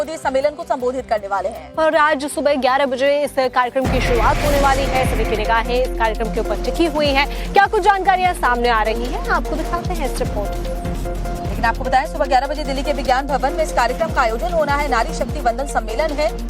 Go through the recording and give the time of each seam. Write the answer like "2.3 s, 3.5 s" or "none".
12.3 s